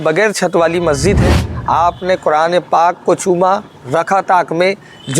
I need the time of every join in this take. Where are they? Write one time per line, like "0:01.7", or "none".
0:01.5